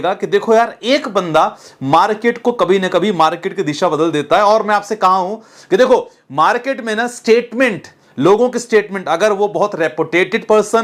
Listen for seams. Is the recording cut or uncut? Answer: uncut